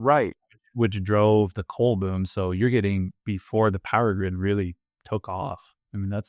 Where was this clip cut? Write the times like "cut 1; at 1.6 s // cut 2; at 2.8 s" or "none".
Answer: none